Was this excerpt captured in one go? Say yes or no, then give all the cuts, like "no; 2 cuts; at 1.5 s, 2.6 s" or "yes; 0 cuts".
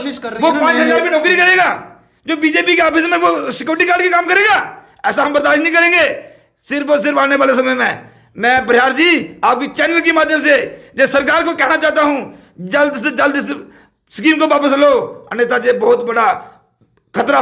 yes; 0 cuts